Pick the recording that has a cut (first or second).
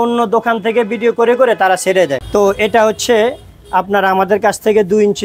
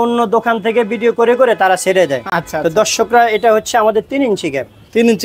first